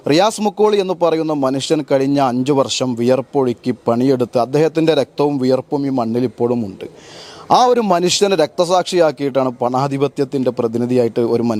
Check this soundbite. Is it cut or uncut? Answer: uncut